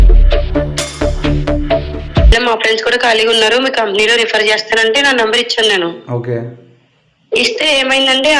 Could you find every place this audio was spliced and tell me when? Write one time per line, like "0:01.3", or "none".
0:02.3